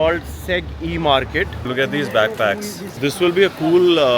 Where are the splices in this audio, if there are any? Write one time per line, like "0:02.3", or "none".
0:01.6
0:02.8